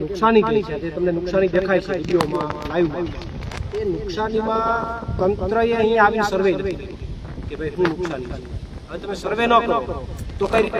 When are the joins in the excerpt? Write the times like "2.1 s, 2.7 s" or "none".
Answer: none